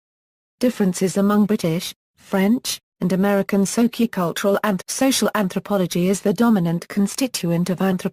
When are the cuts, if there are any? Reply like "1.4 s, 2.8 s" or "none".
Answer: none